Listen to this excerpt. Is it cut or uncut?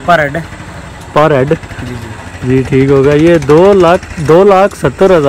uncut